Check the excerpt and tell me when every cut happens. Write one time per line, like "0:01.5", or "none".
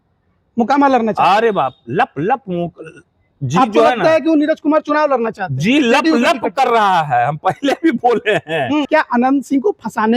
0:08.9